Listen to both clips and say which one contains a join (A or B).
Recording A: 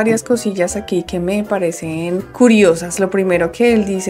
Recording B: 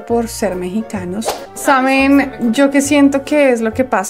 B